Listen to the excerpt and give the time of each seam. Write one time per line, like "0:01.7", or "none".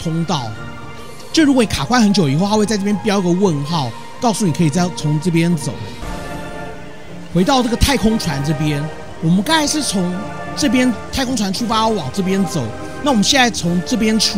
0:06.0